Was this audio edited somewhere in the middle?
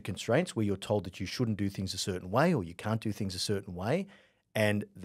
no; 0 cuts

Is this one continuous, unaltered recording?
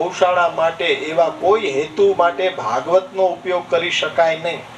yes; 0 cuts

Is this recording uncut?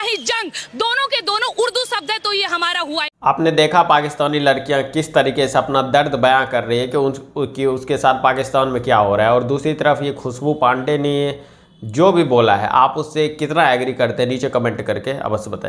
yes; 0 cuts

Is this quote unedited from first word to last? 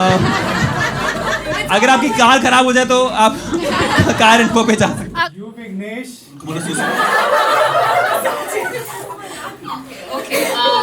no; 1 cut; at 5.3 s

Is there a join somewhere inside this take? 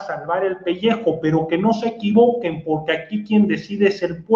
no; 0 cuts

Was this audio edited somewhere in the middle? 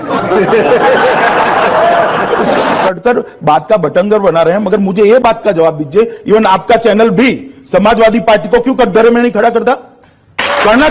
yes; 1 cut; at 2.8 s

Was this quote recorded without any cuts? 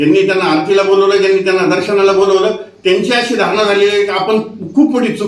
yes; 0 cuts

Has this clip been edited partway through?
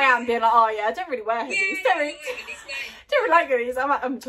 no; 0 cuts

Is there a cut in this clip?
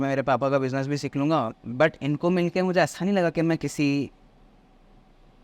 yes; 1 cut; at 1.5 s

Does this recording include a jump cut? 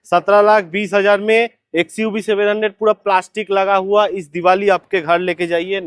no; 0 cuts

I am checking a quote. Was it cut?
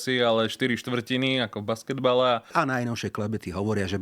yes; 1 cut; at 2.5 s

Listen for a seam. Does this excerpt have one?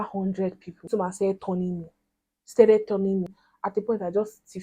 yes; 2 cuts; at 0.8 s, 3.3 s

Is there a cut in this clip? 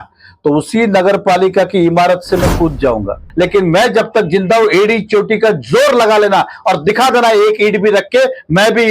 yes; 1 cut; at 3.2 s

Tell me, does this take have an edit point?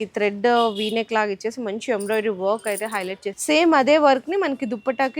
yes; 1 cut; at 3.3 s

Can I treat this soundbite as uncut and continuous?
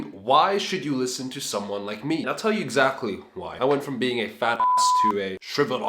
no; 2 cuts; at 2.3 s, 3.4 s

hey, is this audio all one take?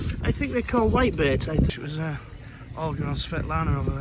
no; 1 cut; at 1.7 s

